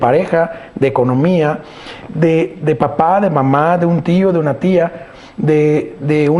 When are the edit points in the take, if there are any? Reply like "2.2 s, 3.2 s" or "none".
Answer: none

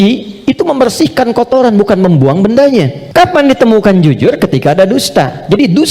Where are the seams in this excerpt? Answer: 3.0 s

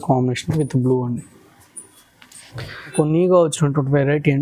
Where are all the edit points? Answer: 2.9 s

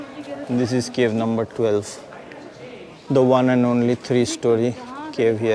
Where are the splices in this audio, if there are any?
none

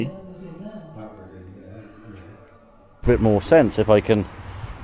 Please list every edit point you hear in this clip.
3.0 s

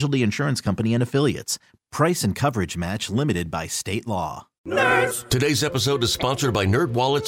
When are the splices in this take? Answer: 4.5 s

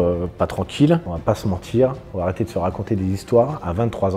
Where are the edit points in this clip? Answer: 1.1 s

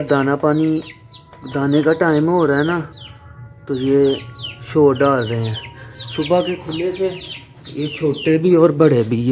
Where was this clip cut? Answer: none

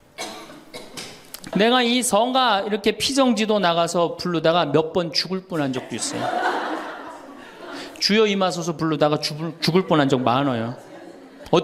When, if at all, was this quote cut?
1.5 s

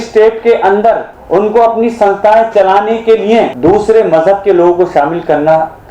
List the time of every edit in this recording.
1.1 s, 3.5 s

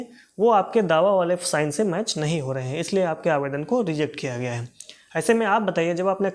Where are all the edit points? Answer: none

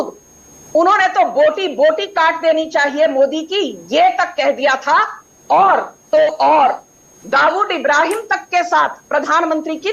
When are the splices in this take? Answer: none

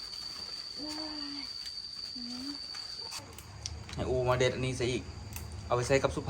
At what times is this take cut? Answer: 3.2 s

